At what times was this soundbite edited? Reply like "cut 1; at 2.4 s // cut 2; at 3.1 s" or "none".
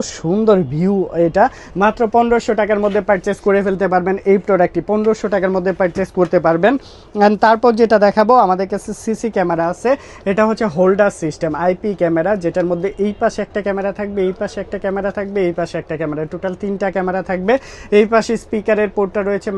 none